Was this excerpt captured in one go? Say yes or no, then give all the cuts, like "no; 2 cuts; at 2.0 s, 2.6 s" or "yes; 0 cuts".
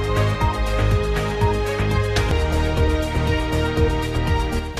yes; 0 cuts